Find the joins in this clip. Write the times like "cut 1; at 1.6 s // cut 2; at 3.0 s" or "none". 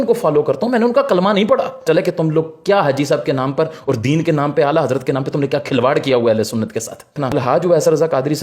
cut 1; at 1.9 s // cut 2; at 7.2 s